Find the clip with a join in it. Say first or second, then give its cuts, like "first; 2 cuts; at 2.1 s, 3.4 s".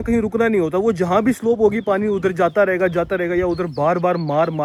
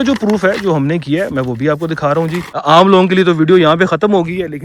second; 1 cut; at 2.5 s